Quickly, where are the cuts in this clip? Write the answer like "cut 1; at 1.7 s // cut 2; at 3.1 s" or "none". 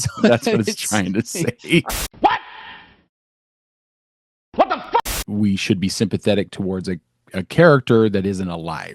cut 1; at 1.9 s // cut 2; at 5.2 s